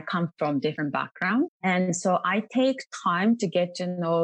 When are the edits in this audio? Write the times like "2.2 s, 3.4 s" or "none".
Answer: 1.3 s